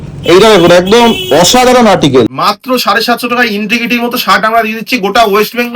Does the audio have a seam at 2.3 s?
yes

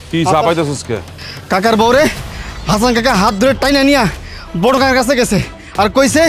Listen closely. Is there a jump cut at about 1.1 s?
yes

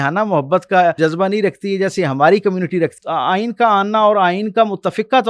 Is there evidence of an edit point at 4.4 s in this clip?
no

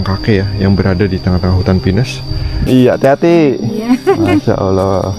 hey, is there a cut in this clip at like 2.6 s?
yes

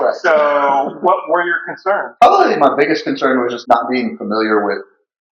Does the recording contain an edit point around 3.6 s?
yes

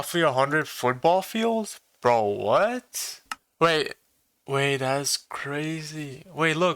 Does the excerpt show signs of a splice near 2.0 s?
no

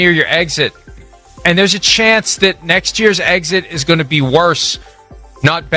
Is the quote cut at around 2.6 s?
no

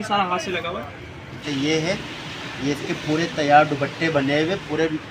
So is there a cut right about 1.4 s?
yes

